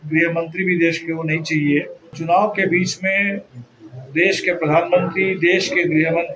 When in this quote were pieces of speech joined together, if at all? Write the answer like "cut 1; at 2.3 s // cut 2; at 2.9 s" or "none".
cut 1; at 2.2 s

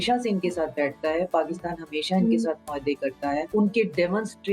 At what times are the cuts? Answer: cut 1; at 3.5 s

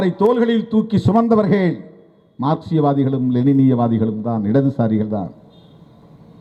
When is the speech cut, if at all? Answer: none

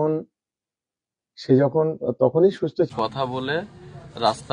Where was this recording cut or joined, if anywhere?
cut 1; at 2.9 s

